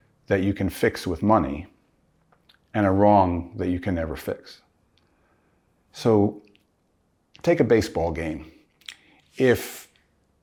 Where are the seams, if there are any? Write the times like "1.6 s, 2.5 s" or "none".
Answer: none